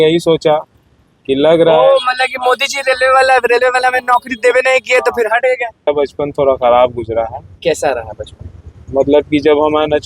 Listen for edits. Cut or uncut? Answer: cut